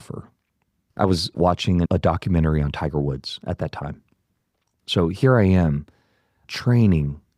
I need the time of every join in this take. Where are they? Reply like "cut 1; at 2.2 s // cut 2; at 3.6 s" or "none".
cut 1; at 1.3 s // cut 2; at 4.6 s